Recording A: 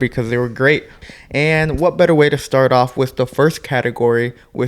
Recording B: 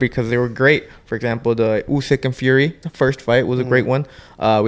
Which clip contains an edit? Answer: A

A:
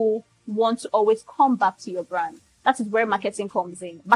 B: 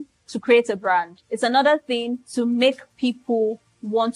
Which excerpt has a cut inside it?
B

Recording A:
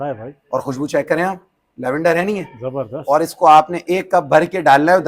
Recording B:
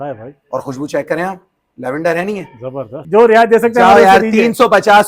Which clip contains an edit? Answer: B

